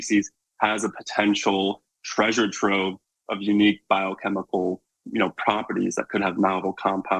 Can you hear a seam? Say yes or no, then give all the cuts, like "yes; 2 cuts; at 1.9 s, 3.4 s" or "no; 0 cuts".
no; 0 cuts